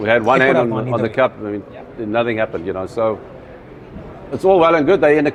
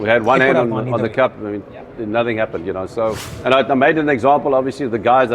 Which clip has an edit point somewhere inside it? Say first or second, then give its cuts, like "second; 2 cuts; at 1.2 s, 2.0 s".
second; 1 cut; at 3.3 s